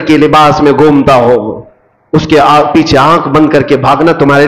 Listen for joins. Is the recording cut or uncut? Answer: uncut